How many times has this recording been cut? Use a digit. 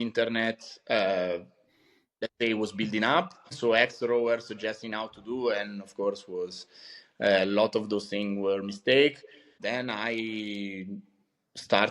2